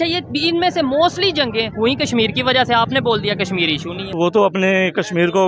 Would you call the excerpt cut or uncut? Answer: cut